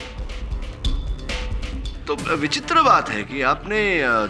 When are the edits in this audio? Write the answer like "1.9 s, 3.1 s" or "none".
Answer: none